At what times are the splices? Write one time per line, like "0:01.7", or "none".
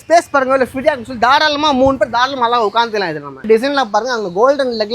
0:03.4